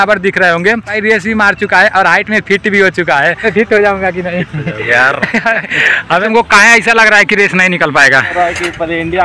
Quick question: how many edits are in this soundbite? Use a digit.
4